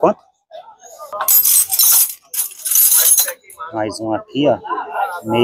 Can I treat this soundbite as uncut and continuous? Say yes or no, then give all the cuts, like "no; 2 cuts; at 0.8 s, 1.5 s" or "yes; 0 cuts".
no; 1 cut; at 1.1 s